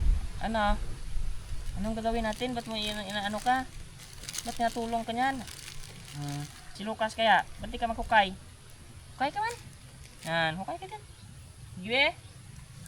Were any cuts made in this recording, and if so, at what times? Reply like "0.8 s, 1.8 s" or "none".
6.6 s